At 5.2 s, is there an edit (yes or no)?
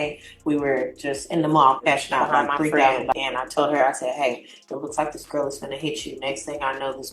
no